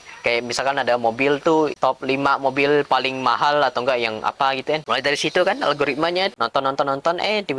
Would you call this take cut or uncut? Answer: cut